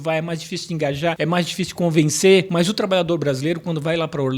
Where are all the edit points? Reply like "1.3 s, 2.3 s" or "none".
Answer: 1.2 s, 2.5 s